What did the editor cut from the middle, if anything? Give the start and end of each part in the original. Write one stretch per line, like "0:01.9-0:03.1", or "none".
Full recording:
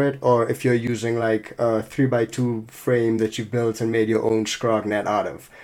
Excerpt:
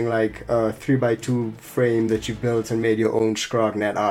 none